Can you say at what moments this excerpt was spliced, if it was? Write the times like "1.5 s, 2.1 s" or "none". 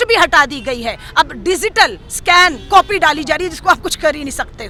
none